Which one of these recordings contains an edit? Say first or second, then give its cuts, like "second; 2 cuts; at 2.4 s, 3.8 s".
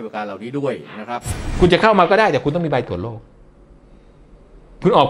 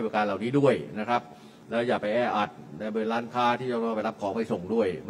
first; 1 cut; at 1.4 s